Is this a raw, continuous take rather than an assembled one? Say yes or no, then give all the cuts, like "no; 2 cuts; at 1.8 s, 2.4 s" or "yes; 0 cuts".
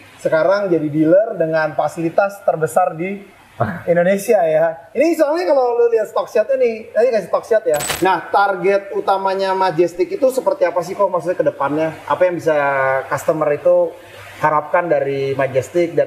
no; 1 cut; at 7.9 s